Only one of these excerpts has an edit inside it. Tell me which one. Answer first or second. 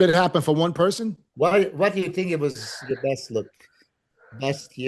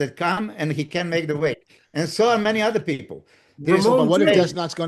first